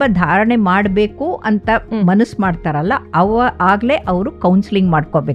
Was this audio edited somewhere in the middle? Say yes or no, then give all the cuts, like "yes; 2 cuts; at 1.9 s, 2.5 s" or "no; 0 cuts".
no; 0 cuts